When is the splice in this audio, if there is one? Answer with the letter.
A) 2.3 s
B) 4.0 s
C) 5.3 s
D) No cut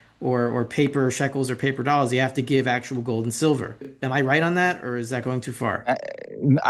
B